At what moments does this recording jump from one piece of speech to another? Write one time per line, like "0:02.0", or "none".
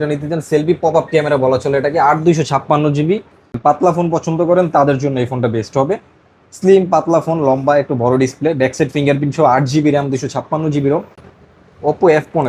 0:03.5
0:11.2